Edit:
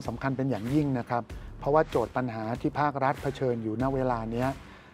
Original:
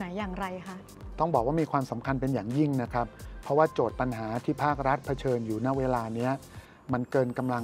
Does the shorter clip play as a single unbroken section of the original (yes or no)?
yes